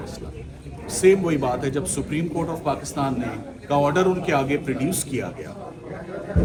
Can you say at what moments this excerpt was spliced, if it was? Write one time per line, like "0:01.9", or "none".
none